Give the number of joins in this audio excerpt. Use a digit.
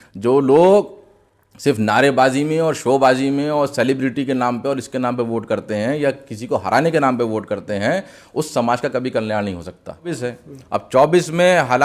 1